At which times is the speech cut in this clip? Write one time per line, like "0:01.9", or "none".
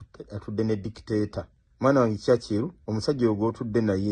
0:01.6
0:02.8